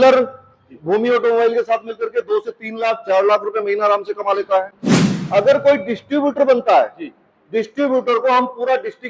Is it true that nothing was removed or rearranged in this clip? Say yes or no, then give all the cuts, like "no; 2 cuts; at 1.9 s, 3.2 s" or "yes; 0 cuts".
yes; 0 cuts